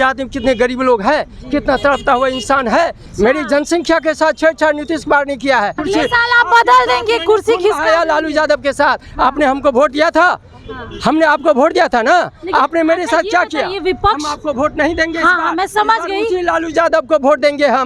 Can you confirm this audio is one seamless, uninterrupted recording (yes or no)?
no